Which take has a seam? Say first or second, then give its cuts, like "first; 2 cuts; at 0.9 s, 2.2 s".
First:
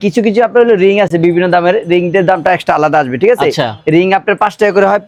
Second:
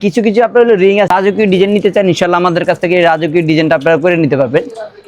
second; 1 cut; at 1.1 s